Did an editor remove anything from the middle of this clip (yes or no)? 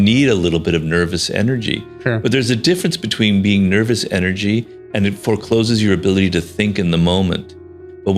no